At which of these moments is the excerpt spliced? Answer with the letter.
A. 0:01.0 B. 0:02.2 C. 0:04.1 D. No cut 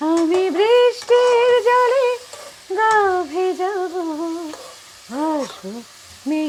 D